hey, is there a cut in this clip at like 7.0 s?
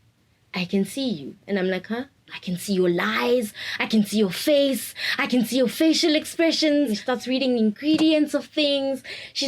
yes; 2 cuts; at 2.3 s, 7.0 s

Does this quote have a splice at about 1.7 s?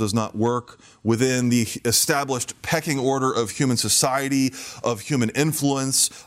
no; 0 cuts

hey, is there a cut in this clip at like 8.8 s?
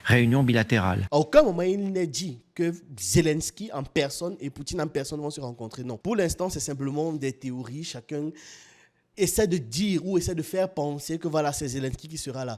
no; 1 cut; at 1.0 s

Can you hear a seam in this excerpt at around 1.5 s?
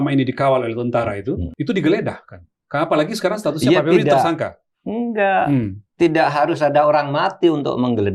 yes; 1 cut; at 1.5 s

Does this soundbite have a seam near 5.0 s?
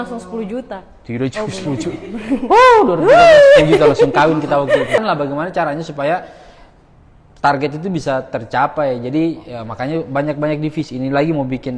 yes; 1 cut; at 5.0 s

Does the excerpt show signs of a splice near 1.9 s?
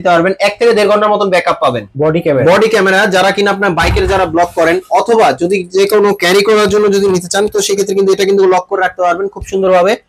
yes; 1 cut; at 1.9 s

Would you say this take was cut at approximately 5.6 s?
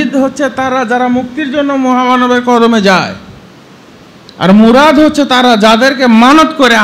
no; 0 cuts

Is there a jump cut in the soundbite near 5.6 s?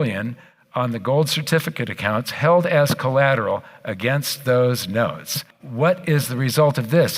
yes; 1 cut; at 5.6 s

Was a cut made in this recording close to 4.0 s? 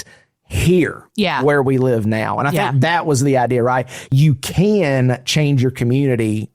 yes; 1 cut; at 4.0 s

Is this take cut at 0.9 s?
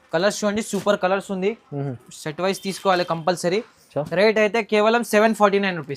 no; 0 cuts

